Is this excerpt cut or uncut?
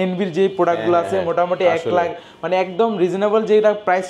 uncut